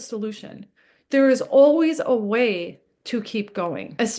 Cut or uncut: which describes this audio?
uncut